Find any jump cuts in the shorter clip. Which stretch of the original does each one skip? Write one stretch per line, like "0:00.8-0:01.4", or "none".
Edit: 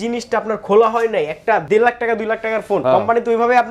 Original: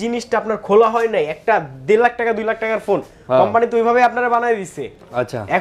0:01.6-0:01.8
0:03.0-0:03.3